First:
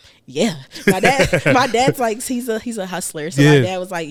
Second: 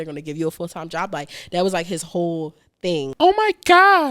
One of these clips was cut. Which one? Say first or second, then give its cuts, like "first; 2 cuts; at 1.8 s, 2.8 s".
second; 1 cut; at 3.1 s